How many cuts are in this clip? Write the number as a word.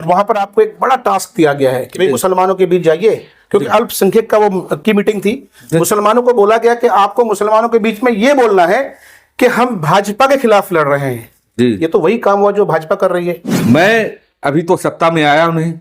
one